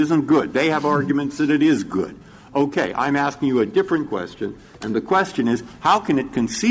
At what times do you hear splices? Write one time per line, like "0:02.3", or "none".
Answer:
none